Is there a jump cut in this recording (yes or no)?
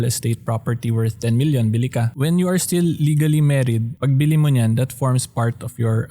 yes